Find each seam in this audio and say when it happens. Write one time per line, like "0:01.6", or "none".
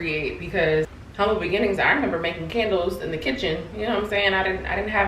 0:01.0